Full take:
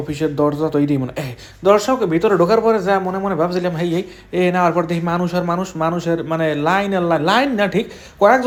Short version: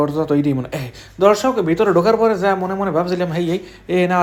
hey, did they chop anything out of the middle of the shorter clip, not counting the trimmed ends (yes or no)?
no